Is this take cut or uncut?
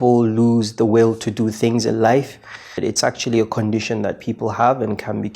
cut